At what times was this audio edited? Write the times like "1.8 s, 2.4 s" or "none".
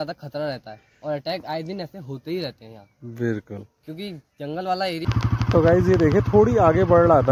5.1 s